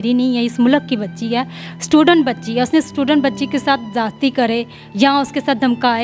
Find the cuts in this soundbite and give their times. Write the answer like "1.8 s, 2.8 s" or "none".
none